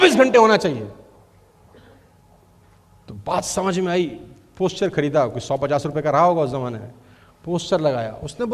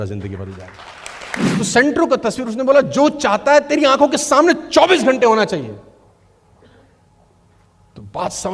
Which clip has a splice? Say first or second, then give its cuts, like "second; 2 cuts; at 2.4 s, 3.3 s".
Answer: second; 1 cut; at 1.5 s